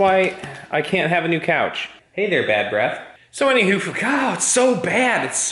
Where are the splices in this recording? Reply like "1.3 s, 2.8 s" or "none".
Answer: 1.9 s